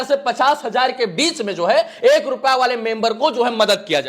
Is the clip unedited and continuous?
yes; 0 cuts

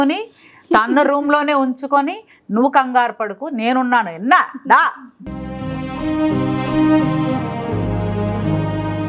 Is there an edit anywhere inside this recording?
no; 0 cuts

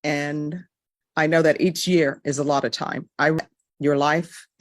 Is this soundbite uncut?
no; 1 cut; at 3.4 s

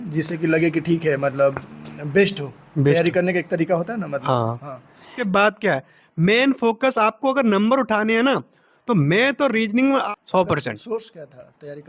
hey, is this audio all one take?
no; 2 cuts; at 5.2 s, 10.1 s

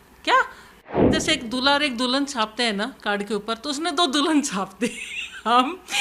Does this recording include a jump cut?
yes; 1 cut; at 1.1 s

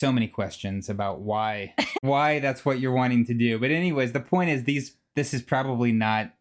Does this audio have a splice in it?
no; 0 cuts

